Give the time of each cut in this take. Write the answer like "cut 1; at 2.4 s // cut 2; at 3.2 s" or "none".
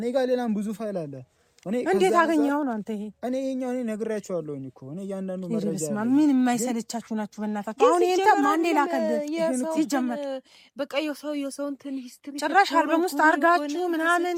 none

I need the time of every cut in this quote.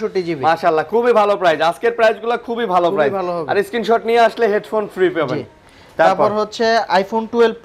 none

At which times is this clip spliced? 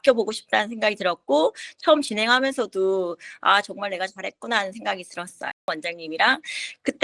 cut 1; at 5.7 s

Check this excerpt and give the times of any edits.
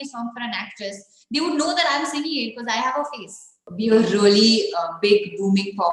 cut 1; at 3.6 s

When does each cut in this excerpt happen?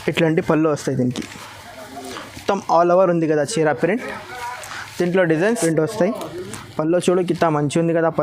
cut 1; at 5.5 s

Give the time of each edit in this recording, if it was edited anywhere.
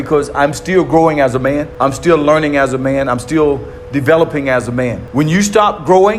cut 1; at 1.7 s // cut 2; at 5.0 s

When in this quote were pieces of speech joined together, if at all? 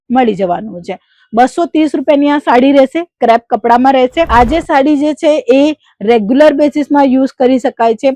cut 1; at 4.3 s

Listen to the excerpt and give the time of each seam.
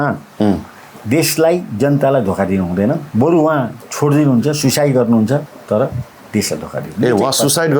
cut 1; at 3.1 s // cut 2; at 5.5 s

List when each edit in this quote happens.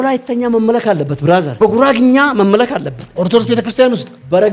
cut 1; at 1.5 s

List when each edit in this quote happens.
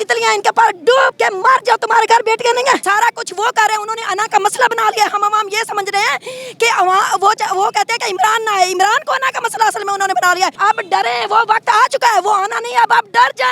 cut 1; at 1.1 s // cut 2; at 2.8 s // cut 3; at 10.6 s

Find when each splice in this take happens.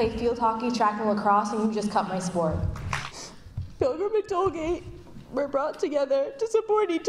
cut 1; at 3.3 s

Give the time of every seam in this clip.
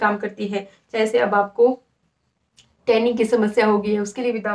none

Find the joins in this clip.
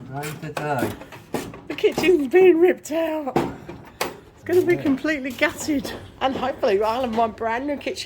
cut 1; at 6.0 s

